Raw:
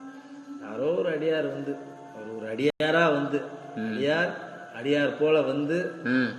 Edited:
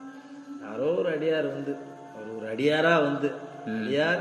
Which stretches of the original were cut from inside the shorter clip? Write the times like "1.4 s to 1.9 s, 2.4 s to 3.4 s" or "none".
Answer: 2.7 s to 2.8 s